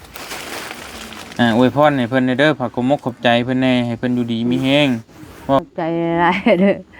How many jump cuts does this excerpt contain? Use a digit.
1